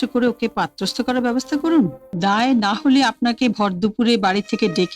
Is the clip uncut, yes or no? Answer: no